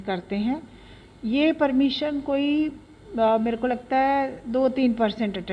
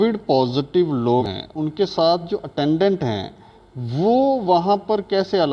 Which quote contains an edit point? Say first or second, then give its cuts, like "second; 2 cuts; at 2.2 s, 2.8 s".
second; 1 cut; at 1.3 s